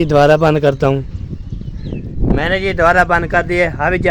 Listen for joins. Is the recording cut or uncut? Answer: cut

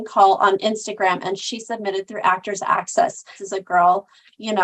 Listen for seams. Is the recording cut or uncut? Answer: cut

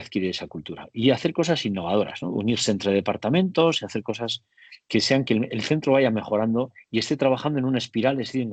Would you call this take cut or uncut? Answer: uncut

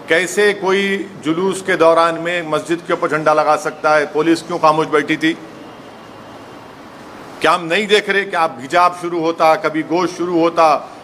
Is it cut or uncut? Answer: cut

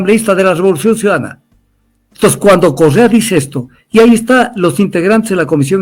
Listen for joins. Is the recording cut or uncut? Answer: uncut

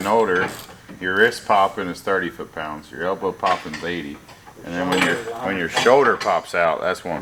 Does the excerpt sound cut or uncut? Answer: uncut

